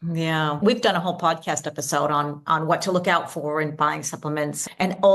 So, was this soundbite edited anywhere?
no; 0 cuts

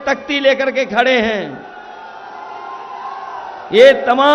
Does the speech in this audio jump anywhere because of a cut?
no; 0 cuts

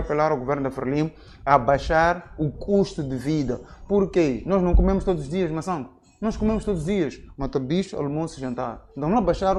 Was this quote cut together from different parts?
no; 0 cuts

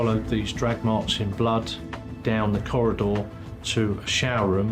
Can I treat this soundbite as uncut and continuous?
yes; 0 cuts

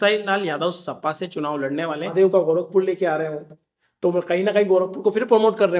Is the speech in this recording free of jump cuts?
no; 1 cut; at 1.8 s

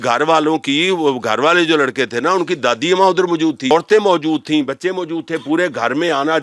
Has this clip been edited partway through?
yes; 1 cut; at 3.7 s

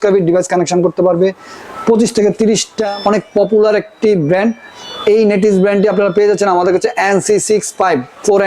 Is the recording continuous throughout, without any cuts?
no; 1 cut; at 2.8 s

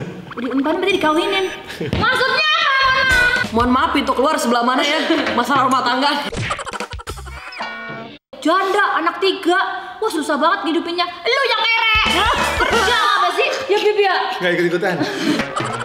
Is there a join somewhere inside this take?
yes; 2 cuts; at 3.4 s, 8.3 s

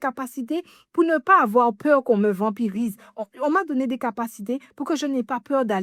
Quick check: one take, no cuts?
yes; 0 cuts

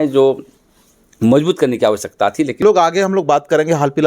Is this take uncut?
no; 1 cut; at 2.6 s

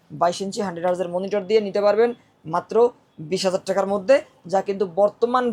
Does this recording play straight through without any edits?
yes; 0 cuts

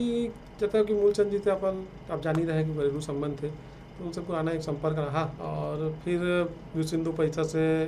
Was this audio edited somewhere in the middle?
no; 0 cuts

